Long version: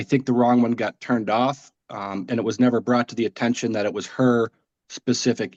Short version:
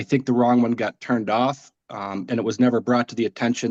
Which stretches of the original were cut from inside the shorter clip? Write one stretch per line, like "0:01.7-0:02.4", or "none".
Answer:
none